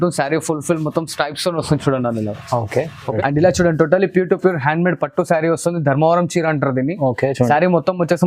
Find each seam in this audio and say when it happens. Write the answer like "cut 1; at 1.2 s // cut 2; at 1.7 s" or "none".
cut 1; at 3.1 s